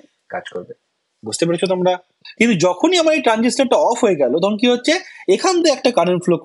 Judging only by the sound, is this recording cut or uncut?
cut